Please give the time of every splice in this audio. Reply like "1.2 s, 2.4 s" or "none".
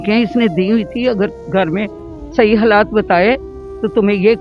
none

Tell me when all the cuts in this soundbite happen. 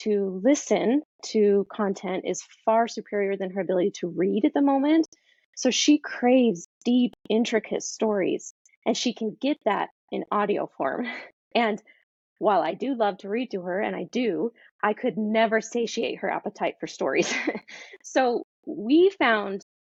none

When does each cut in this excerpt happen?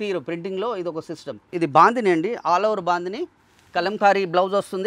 1.4 s

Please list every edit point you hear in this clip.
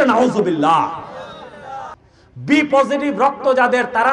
2.0 s

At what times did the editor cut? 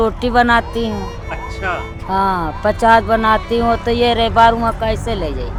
none

